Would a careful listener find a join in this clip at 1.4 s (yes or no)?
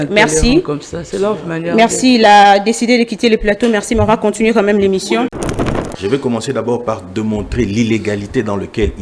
no